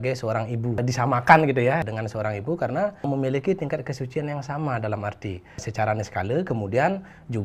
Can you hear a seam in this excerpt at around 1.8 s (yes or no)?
yes